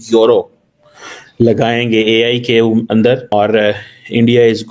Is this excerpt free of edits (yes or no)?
no